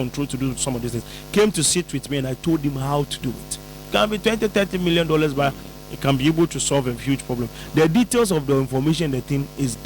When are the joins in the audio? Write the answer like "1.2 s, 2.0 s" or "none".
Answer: 3.8 s

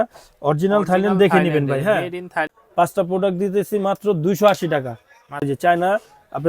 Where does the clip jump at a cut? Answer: 2.6 s, 5.4 s

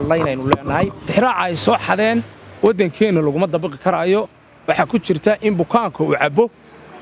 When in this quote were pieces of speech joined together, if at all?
1.0 s

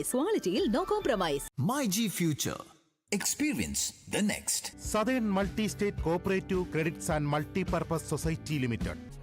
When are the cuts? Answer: 1.4 s

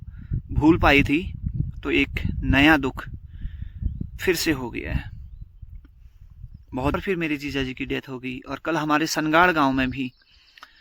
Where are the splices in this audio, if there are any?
6.9 s

